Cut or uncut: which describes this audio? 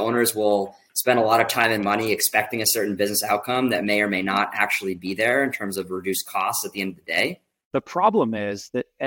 cut